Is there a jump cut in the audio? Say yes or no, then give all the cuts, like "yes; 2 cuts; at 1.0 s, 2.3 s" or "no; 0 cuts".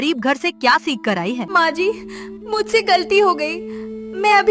yes; 1 cut; at 1.5 s